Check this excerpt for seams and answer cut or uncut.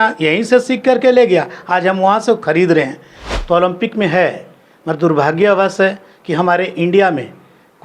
cut